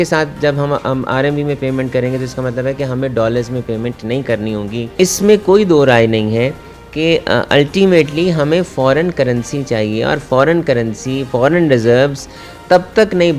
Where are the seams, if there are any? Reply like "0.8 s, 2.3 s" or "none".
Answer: 5.0 s